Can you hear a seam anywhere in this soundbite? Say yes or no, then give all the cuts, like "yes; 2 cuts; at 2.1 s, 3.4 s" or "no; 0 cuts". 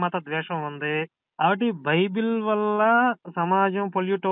yes; 2 cuts; at 1.2 s, 3.3 s